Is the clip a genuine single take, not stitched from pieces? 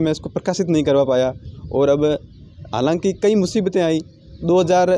yes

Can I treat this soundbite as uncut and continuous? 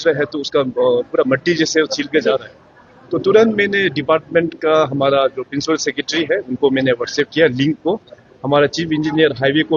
yes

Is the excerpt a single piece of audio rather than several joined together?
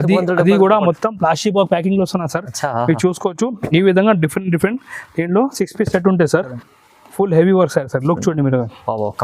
no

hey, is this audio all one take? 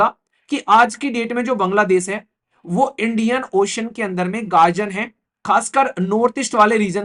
yes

